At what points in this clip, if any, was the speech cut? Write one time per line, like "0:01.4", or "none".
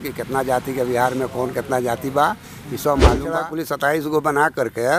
0:03.3